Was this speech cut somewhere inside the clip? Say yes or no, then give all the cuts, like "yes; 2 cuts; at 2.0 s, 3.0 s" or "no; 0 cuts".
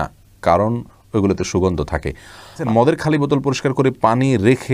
yes; 1 cut; at 2.6 s